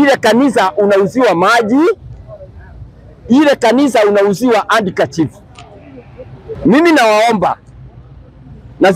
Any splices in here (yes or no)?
yes